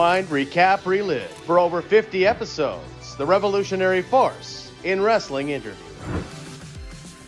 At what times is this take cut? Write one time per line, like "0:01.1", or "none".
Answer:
0:06.4